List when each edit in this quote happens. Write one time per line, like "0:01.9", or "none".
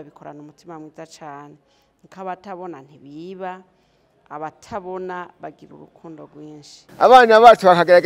0:06.8